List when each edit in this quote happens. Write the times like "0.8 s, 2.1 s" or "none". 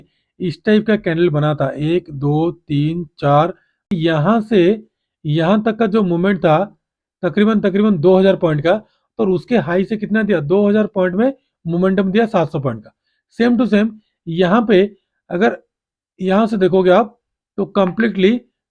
3.9 s